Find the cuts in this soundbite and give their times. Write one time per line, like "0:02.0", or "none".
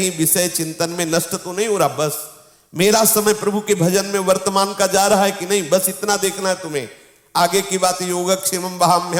none